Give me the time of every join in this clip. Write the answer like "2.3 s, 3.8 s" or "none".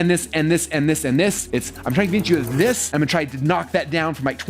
1.4 s, 2.8 s